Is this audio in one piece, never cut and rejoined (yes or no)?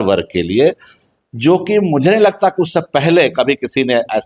yes